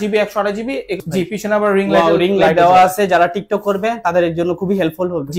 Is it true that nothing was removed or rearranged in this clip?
no; 1 cut; at 1.0 s

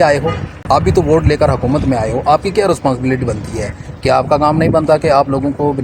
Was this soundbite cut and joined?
no; 0 cuts

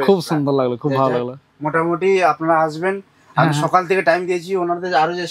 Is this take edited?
no; 0 cuts

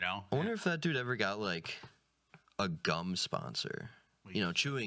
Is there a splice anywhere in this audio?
no; 0 cuts

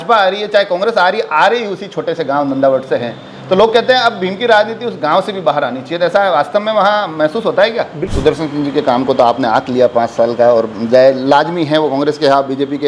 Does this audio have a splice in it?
yes; 1 cut; at 8.0 s

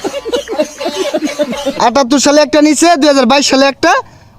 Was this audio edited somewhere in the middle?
yes; 1 cut; at 1.3 s

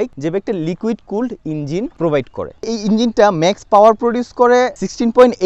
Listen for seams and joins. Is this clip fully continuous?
yes; 0 cuts

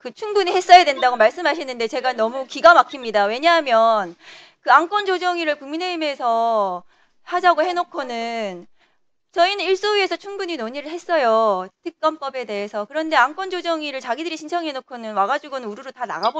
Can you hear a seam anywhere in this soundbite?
no; 0 cuts

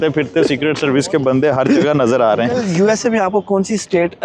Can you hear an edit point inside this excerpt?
yes; 1 cut; at 2.6 s

